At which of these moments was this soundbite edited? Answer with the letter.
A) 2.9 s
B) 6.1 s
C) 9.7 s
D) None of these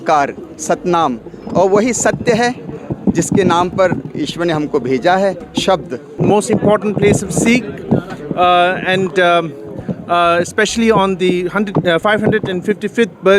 B